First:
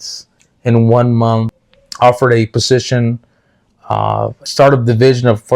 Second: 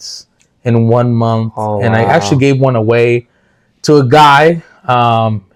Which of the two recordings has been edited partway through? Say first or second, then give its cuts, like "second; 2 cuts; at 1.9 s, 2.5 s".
first; 2 cuts; at 1.5 s, 4.4 s